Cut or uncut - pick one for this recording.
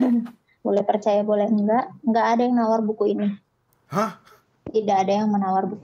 uncut